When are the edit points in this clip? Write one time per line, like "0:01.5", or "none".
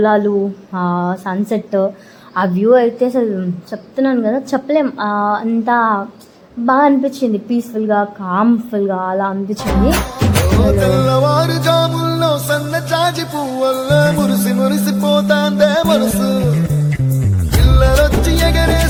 none